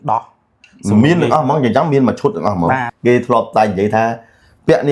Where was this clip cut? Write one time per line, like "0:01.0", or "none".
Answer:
0:02.9